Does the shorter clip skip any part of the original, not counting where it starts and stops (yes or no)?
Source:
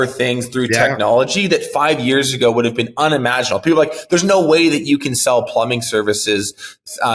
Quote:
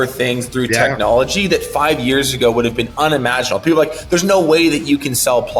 no